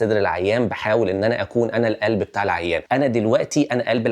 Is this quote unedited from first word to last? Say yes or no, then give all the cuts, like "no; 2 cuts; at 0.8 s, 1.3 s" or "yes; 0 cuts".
no; 1 cut; at 2.8 s